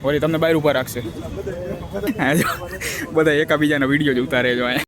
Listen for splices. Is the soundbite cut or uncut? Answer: cut